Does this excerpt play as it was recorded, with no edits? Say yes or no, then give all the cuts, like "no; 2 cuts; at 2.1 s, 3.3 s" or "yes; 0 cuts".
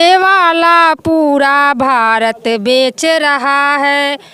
yes; 0 cuts